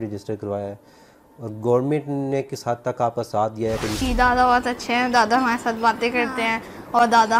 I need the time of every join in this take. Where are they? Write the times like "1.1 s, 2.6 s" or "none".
4.0 s

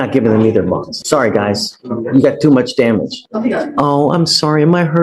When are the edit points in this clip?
1.0 s, 3.2 s

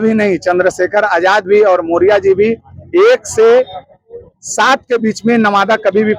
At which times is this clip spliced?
none

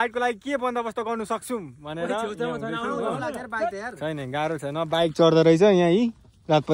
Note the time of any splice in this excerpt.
none

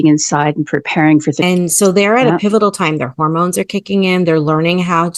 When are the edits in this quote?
1.4 s

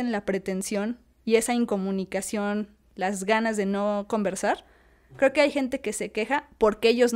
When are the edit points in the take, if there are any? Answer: none

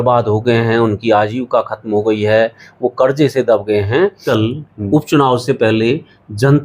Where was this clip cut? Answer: 4.2 s

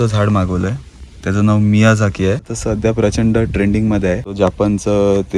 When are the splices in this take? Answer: 2.5 s, 4.3 s

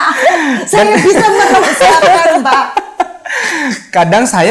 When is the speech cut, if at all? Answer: none

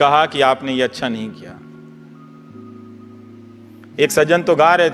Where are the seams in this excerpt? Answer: none

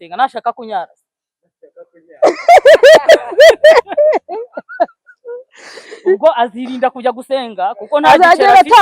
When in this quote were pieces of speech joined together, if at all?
none

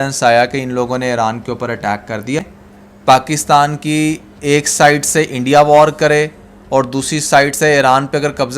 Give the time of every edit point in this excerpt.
2.6 s

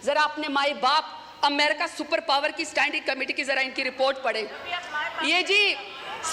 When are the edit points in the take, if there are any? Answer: none

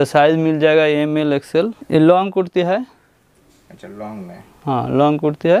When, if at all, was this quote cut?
1.8 s

